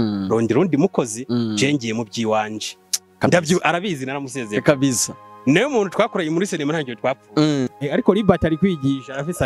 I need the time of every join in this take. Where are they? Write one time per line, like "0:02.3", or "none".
0:07.7